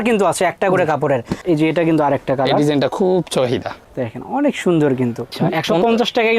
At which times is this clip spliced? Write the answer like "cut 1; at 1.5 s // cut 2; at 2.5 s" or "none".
cut 1; at 1.3 s // cut 2; at 5.3 s